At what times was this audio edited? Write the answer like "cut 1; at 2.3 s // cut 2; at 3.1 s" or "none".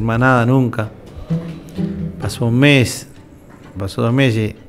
cut 1; at 3.8 s